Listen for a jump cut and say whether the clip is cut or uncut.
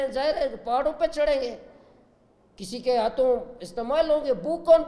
uncut